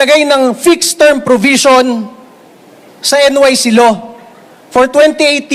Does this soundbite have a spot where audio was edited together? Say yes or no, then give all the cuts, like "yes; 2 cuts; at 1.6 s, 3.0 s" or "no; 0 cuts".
no; 0 cuts